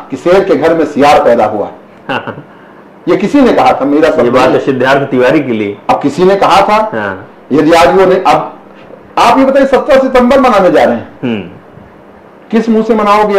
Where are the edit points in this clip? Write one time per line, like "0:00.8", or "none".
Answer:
none